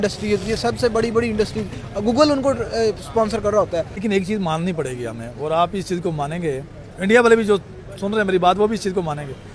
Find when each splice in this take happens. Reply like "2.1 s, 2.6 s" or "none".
3.9 s